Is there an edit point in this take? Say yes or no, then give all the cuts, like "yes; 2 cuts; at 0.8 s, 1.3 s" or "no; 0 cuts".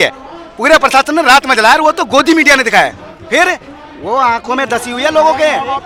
no; 0 cuts